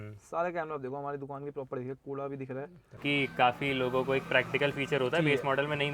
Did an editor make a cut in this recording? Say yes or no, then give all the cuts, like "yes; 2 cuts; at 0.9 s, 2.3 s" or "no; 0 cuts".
yes; 1 cut; at 3.0 s